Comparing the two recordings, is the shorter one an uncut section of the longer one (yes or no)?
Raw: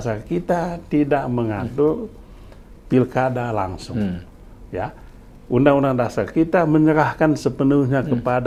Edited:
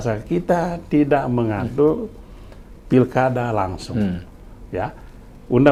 yes